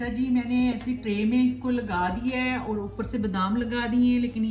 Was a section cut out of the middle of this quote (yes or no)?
no